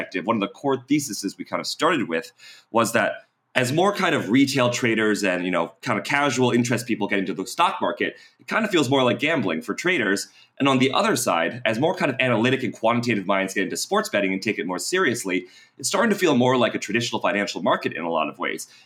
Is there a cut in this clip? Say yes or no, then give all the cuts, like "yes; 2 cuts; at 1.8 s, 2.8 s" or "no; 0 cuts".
no; 0 cuts